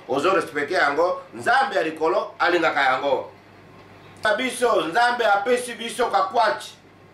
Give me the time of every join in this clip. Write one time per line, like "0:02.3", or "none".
0:04.2